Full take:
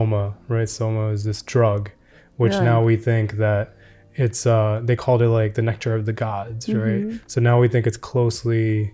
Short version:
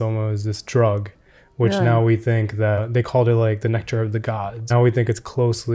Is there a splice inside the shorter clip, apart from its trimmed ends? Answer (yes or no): yes